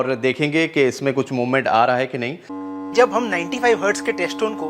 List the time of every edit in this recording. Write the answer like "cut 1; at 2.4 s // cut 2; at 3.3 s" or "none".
cut 1; at 2.5 s